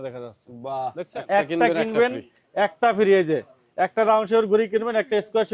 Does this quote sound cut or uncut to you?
cut